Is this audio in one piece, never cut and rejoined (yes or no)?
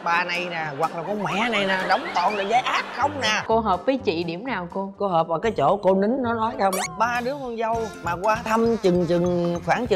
no